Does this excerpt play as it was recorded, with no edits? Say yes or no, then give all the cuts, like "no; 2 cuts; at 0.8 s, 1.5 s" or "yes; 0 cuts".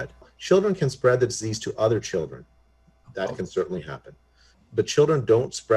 yes; 0 cuts